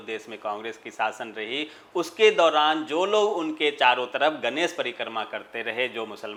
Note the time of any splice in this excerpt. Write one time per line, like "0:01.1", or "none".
none